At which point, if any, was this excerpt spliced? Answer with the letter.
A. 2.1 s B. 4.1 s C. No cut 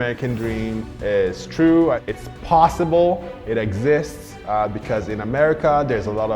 A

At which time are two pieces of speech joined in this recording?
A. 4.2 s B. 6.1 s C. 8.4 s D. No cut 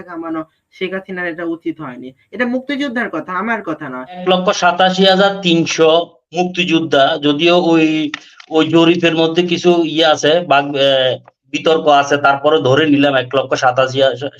A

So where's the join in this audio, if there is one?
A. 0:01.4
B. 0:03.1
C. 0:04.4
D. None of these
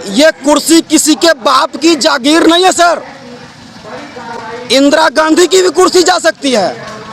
D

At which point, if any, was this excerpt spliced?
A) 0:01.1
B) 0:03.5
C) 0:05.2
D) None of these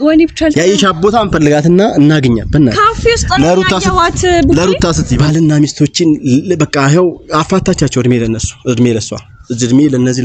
C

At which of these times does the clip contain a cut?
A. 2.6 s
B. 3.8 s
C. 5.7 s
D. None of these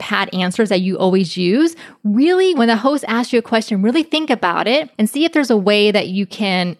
A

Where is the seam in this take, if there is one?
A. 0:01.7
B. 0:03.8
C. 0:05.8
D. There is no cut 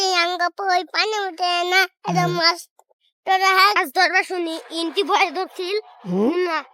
B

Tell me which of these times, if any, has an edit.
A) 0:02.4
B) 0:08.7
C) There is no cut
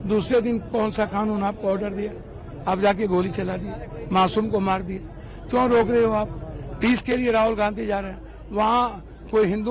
C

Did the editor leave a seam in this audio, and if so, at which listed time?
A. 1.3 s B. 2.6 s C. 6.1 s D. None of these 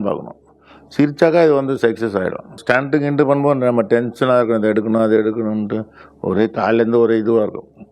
B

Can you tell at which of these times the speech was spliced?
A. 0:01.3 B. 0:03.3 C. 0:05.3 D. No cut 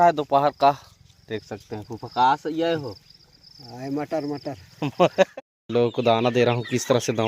C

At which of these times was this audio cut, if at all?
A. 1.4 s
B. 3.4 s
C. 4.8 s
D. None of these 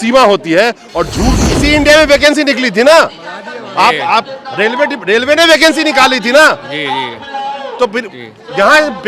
A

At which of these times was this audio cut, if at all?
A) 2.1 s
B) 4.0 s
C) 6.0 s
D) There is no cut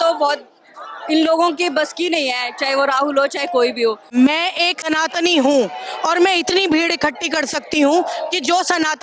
B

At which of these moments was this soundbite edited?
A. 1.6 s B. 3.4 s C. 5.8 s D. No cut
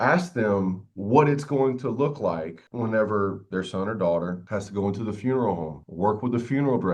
B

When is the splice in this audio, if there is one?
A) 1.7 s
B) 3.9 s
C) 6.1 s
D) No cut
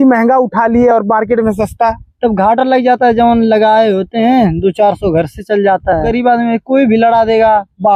C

